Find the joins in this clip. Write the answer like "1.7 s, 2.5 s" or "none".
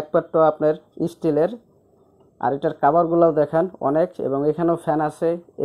none